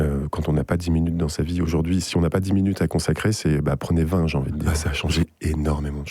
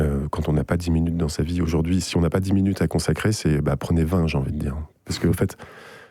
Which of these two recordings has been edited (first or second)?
first